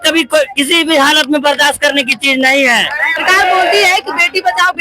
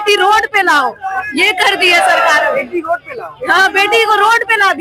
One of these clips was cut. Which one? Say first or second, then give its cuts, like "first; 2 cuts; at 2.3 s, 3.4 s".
first; 1 cut; at 3.2 s